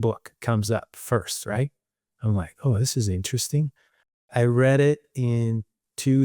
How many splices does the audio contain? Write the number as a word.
one